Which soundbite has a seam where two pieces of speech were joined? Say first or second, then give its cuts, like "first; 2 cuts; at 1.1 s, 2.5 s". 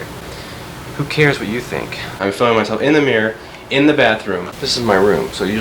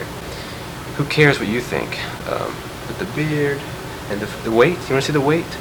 first; 2 cuts; at 2.1 s, 4.6 s